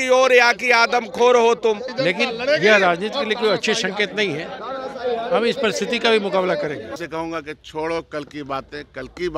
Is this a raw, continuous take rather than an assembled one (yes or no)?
no